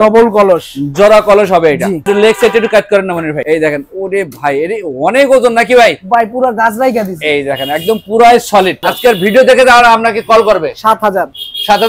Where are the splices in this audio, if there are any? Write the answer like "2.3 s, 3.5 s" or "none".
2.0 s, 3.4 s, 8.9 s